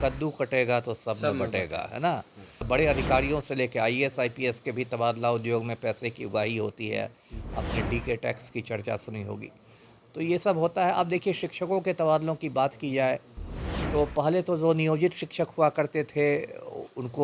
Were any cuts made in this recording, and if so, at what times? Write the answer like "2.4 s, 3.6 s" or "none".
2.7 s